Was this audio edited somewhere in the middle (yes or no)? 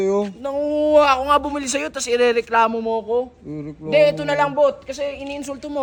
no